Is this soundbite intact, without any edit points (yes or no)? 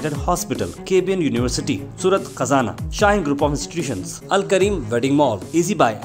yes